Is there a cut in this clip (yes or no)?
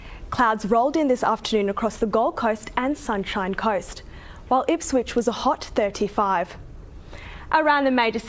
no